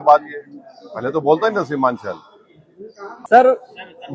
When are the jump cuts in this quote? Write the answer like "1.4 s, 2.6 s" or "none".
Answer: 3.1 s